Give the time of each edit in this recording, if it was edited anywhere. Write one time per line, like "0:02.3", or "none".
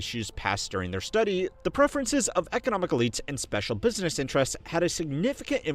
0:03.5